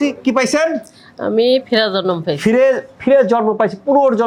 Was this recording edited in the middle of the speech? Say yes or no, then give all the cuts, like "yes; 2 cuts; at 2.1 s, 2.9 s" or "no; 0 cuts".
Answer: no; 0 cuts